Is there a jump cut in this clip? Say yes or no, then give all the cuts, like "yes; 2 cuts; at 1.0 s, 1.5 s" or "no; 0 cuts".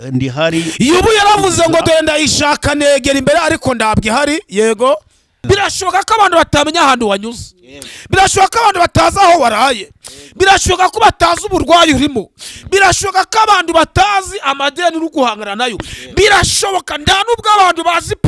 yes; 1 cut; at 5.4 s